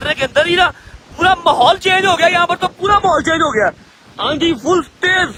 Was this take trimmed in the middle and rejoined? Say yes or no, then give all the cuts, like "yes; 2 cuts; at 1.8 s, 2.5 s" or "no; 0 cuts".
no; 0 cuts